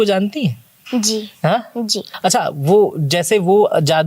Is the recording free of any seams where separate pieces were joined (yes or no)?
no